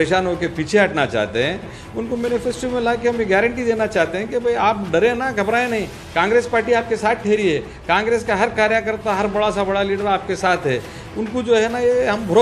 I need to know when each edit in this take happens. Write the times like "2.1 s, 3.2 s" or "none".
none